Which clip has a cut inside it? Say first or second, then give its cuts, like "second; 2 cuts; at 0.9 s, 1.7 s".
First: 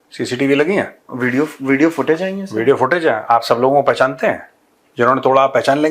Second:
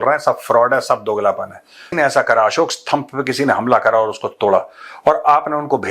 second; 1 cut; at 1.8 s